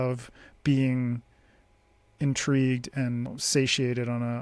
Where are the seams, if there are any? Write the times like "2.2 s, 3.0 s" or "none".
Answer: 3.3 s